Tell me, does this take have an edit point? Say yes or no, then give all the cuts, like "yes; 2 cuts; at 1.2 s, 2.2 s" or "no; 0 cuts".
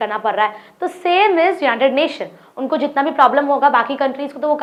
no; 0 cuts